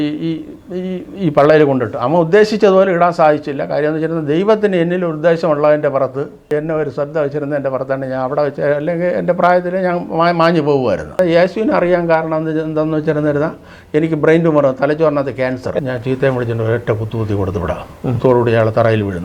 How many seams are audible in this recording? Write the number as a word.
three